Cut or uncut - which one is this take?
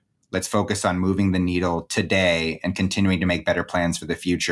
uncut